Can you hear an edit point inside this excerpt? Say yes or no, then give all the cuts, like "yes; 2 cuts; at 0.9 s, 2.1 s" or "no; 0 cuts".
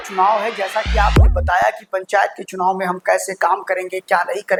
no; 0 cuts